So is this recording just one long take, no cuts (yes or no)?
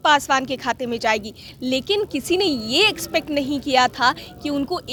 yes